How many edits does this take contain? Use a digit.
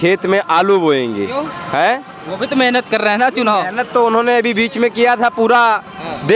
0